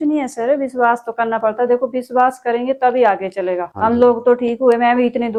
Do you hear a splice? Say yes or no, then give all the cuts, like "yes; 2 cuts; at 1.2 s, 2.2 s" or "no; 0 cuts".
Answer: no; 0 cuts